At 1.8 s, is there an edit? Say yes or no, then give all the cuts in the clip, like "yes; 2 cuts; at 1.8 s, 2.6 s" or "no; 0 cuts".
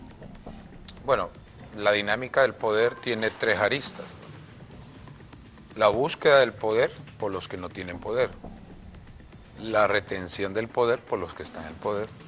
no; 1 cut; at 10.1 s